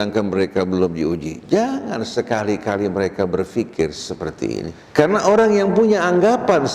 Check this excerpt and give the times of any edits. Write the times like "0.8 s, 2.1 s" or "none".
4.8 s

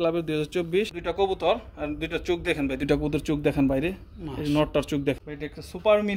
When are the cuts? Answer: 0.9 s, 5.1 s

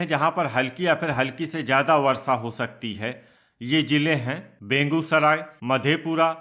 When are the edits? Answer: 4.5 s, 5.5 s

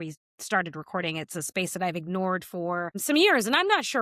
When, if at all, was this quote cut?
3.0 s

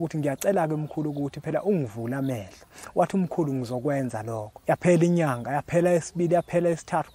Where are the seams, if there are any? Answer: 4.5 s

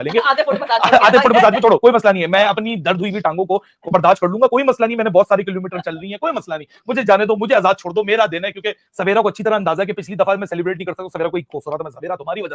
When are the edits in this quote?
none

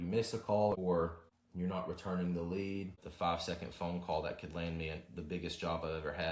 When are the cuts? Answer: 1.0 s, 2.9 s

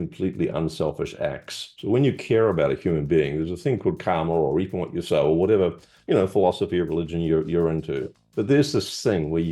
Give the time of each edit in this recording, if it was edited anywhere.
none

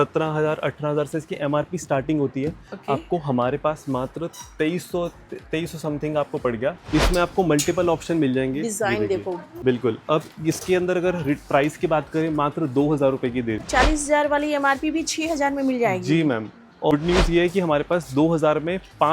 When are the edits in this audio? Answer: 6.8 s, 13.7 s, 16.9 s

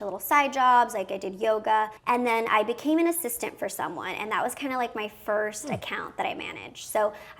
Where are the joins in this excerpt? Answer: 2.0 s

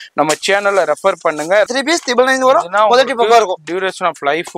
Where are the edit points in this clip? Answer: 1.7 s

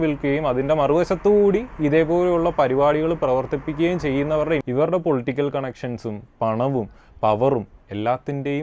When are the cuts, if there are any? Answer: 4.6 s

